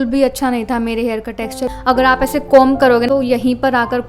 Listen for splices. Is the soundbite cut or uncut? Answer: cut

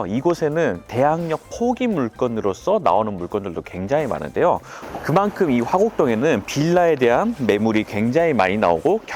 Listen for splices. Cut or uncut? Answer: cut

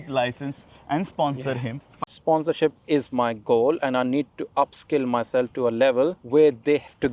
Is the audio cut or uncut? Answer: cut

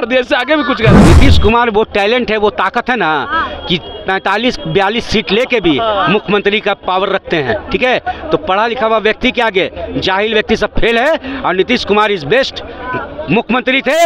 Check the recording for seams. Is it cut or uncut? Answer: cut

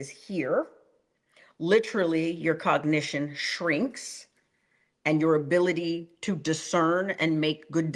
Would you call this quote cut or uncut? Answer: uncut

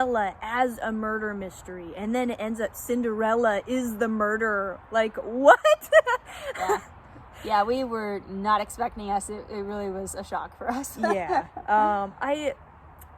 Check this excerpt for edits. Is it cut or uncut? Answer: uncut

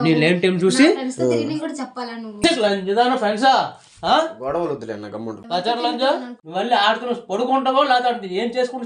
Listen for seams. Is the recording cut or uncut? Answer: cut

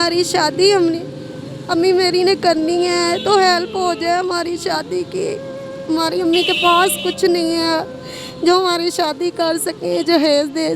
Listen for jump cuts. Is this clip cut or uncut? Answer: uncut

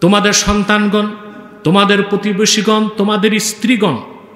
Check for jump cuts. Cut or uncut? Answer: uncut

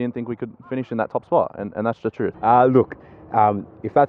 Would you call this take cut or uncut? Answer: cut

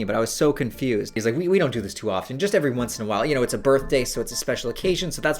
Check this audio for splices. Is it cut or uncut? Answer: cut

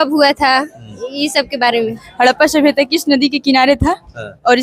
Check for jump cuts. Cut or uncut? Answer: cut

